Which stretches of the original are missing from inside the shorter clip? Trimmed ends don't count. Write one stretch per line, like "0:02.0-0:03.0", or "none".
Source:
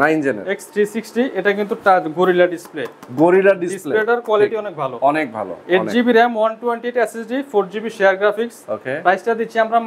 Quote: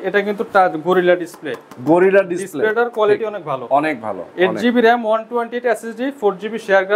none